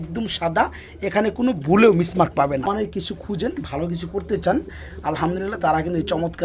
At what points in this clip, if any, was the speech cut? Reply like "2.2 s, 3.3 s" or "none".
2.7 s